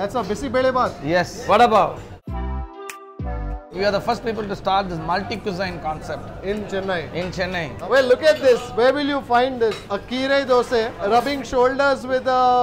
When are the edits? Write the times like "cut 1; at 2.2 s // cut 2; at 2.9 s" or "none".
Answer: cut 1; at 1.4 s // cut 2; at 3.7 s // cut 3; at 7.8 s